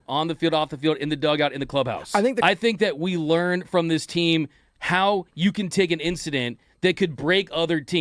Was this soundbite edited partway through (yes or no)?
yes